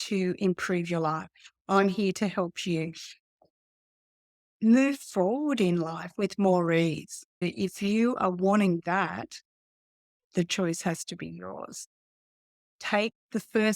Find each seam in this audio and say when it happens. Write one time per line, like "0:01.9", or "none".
0:07.4